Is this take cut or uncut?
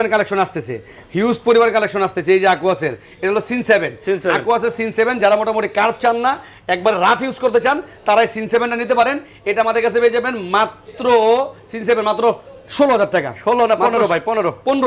uncut